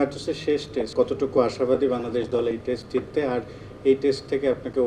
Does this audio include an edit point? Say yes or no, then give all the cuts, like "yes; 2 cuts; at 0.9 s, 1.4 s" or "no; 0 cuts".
yes; 1 cut; at 0.9 s